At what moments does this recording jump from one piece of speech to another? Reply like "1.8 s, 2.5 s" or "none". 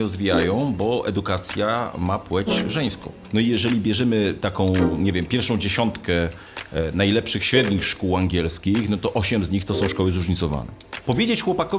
3.1 s, 10.9 s